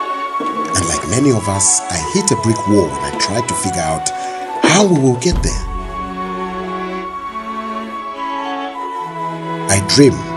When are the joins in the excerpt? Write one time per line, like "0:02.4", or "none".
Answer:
none